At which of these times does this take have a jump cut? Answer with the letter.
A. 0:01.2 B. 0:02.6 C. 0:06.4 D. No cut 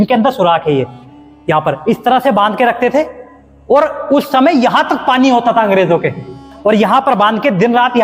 C